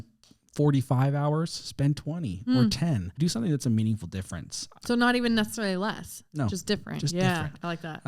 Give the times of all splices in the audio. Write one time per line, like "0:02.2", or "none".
0:03.2